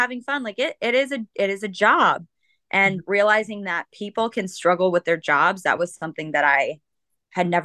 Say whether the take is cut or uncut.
uncut